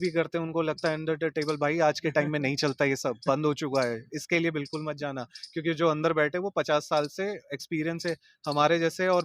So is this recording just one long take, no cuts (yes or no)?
yes